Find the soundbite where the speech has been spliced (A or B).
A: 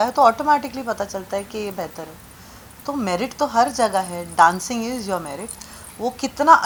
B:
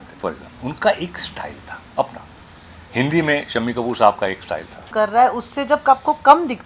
B